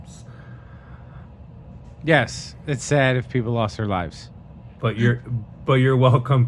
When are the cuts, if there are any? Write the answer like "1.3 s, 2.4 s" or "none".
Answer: 4.6 s